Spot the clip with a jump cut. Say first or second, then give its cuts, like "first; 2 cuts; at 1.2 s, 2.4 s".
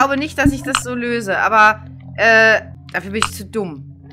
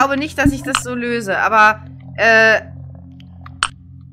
first; 1 cut; at 2.8 s